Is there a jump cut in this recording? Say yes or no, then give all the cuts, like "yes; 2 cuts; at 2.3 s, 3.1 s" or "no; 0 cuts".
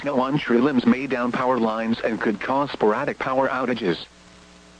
no; 0 cuts